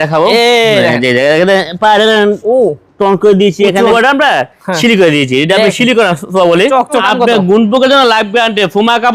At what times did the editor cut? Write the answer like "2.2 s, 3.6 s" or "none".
3.9 s, 6.9 s